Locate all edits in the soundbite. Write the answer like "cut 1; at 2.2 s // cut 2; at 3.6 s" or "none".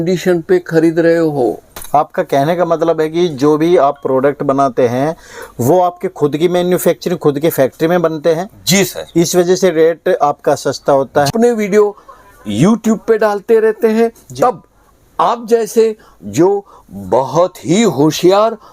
cut 1; at 1.7 s // cut 2; at 11.3 s